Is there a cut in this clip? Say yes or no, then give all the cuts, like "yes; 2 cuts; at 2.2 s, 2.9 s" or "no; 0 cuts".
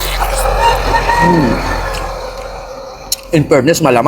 yes; 1 cut; at 1.7 s